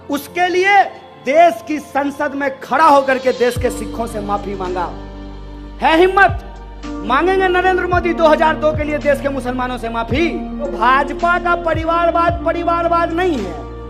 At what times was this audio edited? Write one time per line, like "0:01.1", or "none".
0:10.7